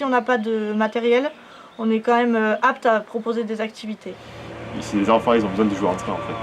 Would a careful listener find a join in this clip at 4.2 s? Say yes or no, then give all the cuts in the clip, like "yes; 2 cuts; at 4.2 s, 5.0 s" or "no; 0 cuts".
yes; 1 cut; at 4.2 s